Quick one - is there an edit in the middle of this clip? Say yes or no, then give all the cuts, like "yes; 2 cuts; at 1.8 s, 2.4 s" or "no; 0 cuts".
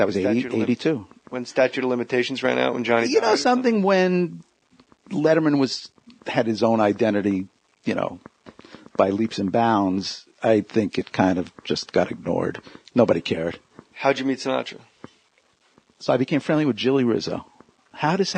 no; 0 cuts